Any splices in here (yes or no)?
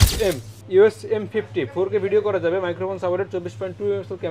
no